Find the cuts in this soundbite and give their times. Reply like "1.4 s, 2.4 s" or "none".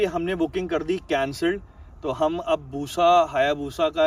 none